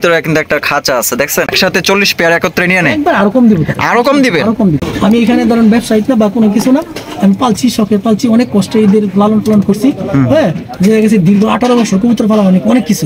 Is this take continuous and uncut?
no; 2 cuts; at 1.5 s, 4.8 s

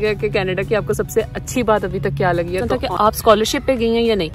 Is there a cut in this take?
yes; 1 cut; at 2.7 s

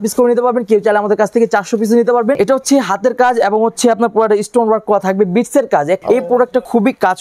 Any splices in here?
yes; 2 cuts; at 2.4 s, 6.0 s

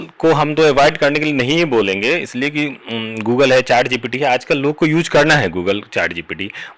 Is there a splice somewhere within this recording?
no; 0 cuts

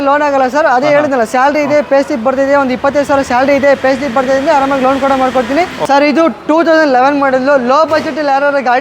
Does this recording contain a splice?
yes; 1 cut; at 5.8 s

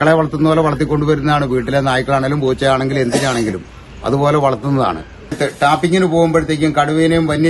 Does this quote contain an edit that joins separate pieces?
yes; 1 cut; at 5.4 s

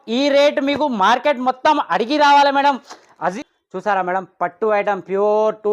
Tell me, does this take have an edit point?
yes; 1 cut; at 3.3 s

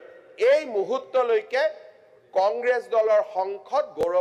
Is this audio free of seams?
yes; 0 cuts

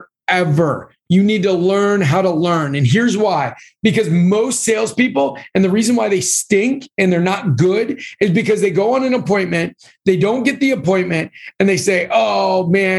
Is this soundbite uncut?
yes; 0 cuts

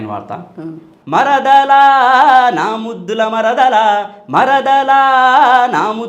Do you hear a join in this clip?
yes; 1 cut; at 0.9 s

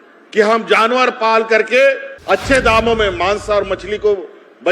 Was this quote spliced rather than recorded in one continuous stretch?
yes; 1 cut; at 2.1 s

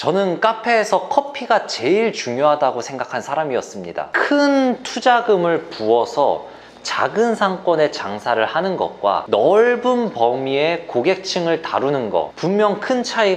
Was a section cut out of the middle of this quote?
yes; 1 cut; at 4.1 s

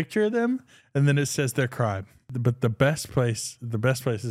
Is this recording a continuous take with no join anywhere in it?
no; 1 cut; at 2.3 s

